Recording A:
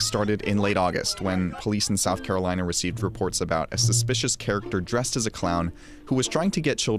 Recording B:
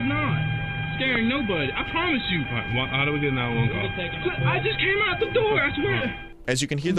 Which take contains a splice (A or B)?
B